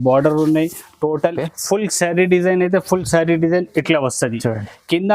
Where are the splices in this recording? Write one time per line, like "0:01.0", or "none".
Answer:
0:01.4